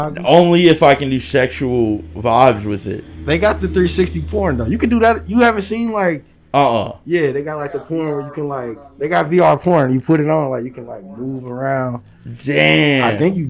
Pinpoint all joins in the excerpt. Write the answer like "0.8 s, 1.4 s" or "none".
none